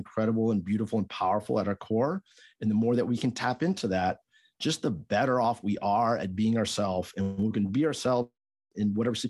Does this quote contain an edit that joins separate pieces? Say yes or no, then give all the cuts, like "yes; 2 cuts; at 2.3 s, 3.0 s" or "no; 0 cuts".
no; 0 cuts